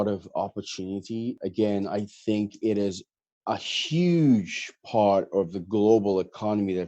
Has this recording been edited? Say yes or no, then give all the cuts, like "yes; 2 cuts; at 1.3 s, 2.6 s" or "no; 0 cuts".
yes; 1 cut; at 1.4 s